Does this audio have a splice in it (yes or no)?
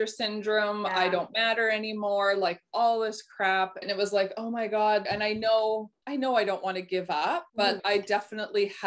yes